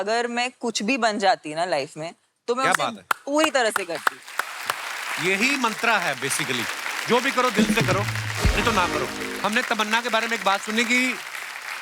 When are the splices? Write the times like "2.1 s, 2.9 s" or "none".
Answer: 9.4 s